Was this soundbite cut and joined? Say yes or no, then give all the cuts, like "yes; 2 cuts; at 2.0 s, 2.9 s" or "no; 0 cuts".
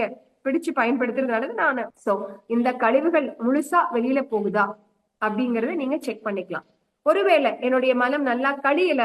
yes; 1 cut; at 1.9 s